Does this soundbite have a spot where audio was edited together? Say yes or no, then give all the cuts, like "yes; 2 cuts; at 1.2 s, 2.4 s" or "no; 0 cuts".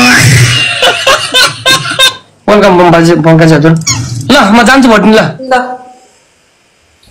yes; 1 cut; at 2.0 s